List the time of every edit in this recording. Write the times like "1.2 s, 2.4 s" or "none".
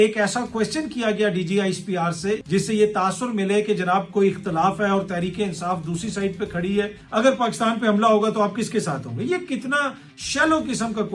2.4 s, 7.0 s